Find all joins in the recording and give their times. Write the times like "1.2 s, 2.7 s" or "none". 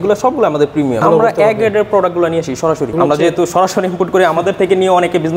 1.0 s, 2.9 s